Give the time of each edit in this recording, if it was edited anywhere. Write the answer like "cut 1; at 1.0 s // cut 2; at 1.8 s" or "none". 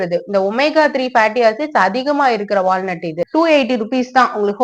cut 1; at 3.3 s